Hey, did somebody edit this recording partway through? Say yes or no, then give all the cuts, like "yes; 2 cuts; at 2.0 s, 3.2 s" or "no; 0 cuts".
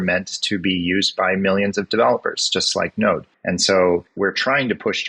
yes; 2 cuts; at 3.3 s, 4.1 s